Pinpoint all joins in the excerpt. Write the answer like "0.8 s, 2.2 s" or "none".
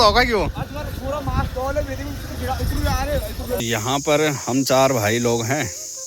3.6 s